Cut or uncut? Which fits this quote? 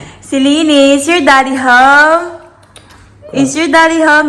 uncut